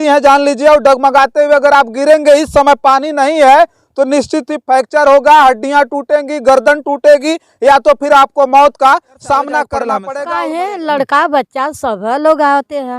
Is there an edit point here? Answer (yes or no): yes